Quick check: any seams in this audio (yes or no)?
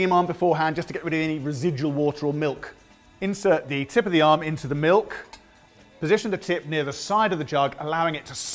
yes